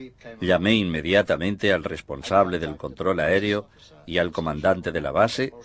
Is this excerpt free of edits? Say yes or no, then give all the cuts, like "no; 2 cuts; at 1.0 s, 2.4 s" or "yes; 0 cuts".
yes; 0 cuts